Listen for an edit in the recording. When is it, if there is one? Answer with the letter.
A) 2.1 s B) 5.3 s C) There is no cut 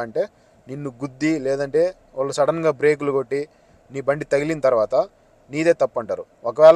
C